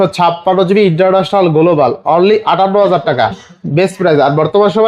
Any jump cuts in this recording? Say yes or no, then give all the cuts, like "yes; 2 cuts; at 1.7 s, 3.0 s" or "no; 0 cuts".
no; 0 cuts